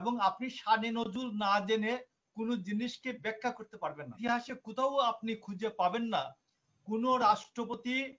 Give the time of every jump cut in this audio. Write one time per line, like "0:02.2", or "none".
0:04.1